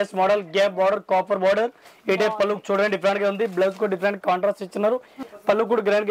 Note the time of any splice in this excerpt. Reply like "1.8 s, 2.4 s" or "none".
5.2 s